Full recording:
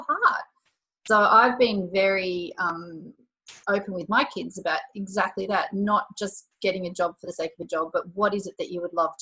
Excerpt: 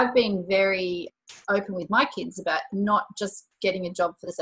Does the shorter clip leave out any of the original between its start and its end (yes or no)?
yes